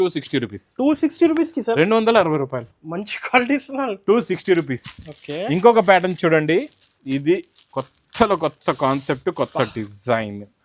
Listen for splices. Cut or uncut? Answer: uncut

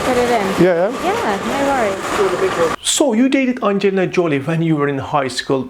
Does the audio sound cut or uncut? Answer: cut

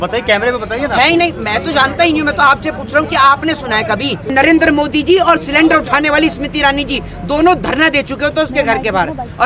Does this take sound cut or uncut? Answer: cut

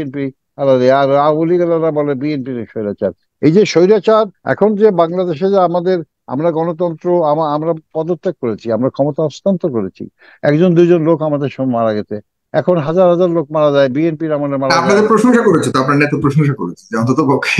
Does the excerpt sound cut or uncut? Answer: cut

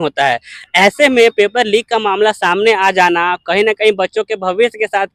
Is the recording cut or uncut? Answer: uncut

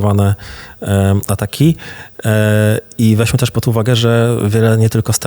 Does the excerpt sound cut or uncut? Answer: uncut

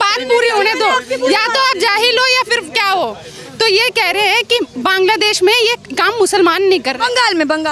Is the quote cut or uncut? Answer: uncut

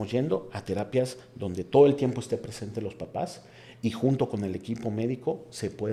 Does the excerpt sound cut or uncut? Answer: uncut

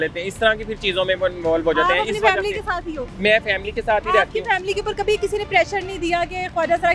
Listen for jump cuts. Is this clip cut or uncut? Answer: uncut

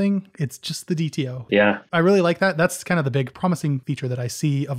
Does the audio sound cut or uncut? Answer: cut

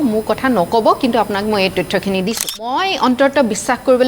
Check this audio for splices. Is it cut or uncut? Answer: cut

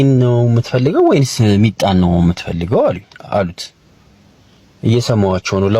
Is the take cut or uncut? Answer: uncut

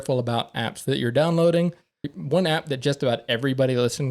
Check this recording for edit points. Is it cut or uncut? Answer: cut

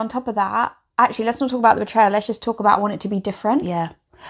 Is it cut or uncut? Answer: uncut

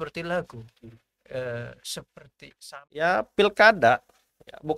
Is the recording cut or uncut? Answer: cut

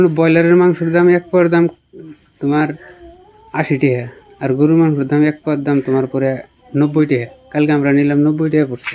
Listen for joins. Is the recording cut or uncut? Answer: uncut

